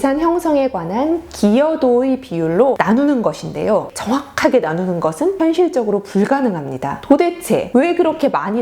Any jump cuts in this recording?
yes; 2 cuts; at 3.9 s, 7.0 s

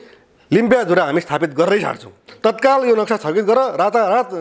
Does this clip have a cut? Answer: yes; 1 cut; at 2.3 s

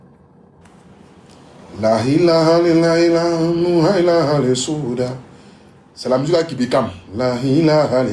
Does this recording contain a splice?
no; 0 cuts

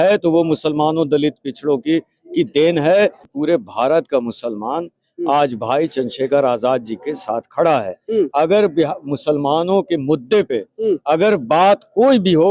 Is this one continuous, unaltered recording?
no; 1 cut; at 3.3 s

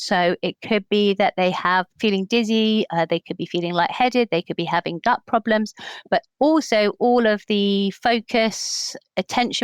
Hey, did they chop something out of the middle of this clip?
yes; 2 cuts; at 1.9 s, 2.9 s

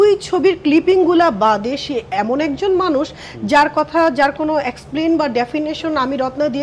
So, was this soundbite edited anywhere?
no; 0 cuts

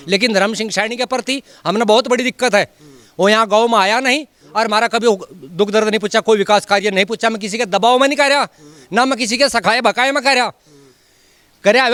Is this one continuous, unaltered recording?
yes; 0 cuts

